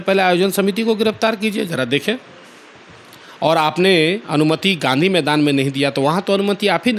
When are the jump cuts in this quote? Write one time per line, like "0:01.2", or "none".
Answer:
none